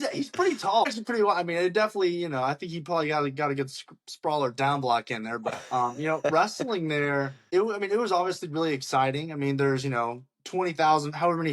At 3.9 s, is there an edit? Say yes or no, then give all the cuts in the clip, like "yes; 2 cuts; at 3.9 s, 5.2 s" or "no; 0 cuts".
no; 3 cuts; at 0.9 s, 5.5 s, 7.4 s